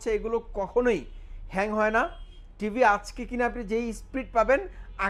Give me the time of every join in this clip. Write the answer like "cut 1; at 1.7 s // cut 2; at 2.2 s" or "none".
none